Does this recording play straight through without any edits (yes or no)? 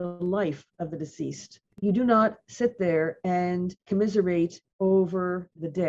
yes